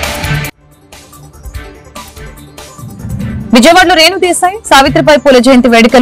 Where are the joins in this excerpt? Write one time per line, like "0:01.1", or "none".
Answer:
0:02.7